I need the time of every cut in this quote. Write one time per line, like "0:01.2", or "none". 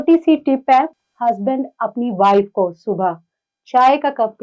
0:00.9